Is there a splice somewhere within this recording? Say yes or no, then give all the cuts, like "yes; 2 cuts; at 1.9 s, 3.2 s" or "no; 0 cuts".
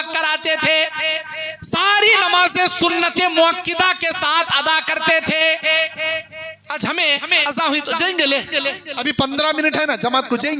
no; 0 cuts